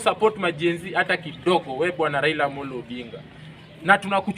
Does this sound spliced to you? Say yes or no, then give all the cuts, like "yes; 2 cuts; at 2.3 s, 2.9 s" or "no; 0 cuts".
no; 0 cuts